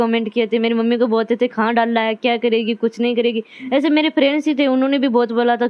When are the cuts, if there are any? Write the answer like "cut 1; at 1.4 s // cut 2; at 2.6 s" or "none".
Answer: none